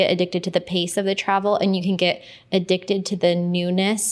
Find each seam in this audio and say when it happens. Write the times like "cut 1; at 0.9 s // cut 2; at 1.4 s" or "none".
none